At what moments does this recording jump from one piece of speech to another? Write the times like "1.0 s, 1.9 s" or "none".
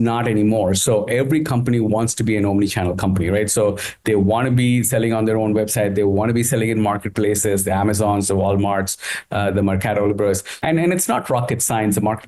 10.5 s